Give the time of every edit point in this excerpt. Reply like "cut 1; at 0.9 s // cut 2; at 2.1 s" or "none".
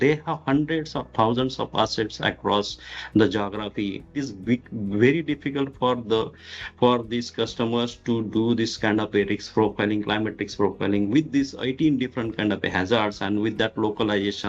cut 1; at 4.3 s

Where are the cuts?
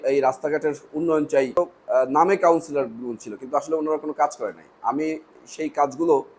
cut 1; at 1.6 s

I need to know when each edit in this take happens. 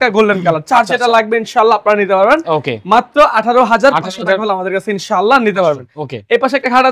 none

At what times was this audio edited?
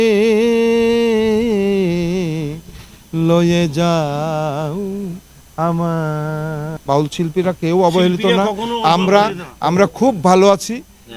cut 1; at 6.7 s

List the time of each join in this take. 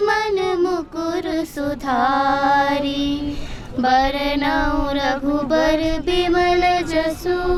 none

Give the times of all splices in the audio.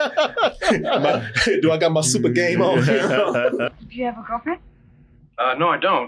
cut 1; at 3.7 s

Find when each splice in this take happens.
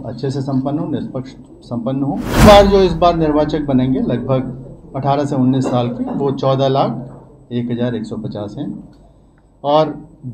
cut 1; at 2.4 s

